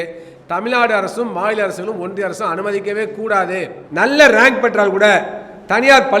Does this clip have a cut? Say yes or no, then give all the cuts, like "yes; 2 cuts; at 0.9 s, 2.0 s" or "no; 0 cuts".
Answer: yes; 1 cut; at 3.8 s